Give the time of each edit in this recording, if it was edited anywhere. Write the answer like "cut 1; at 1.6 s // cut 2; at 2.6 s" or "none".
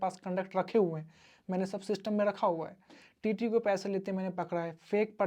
none